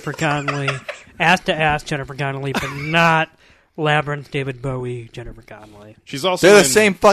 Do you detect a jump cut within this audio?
no; 0 cuts

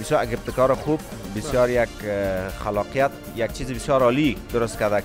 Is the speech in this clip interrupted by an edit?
no; 0 cuts

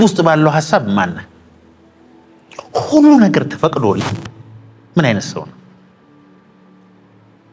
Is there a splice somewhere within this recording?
no; 0 cuts

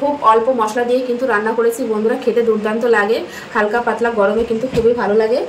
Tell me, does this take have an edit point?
no; 0 cuts

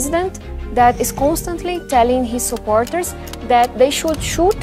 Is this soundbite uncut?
yes; 0 cuts

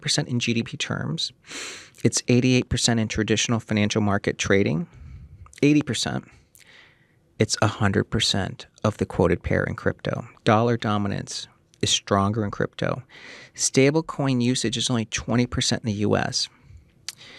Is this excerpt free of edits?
yes; 0 cuts

